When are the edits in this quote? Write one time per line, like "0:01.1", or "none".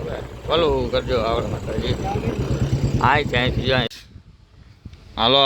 0:03.9